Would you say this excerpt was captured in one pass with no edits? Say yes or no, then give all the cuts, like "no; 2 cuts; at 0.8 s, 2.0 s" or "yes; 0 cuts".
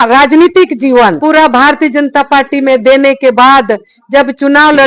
no; 1 cut; at 1.2 s